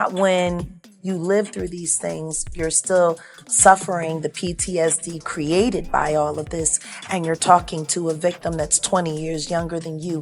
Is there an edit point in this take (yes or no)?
no